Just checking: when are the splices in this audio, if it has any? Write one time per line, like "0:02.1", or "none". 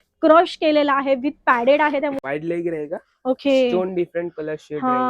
0:02.2